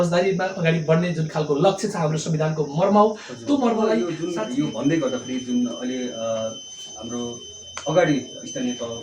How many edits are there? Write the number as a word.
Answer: one